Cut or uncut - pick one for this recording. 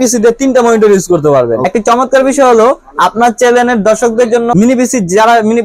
cut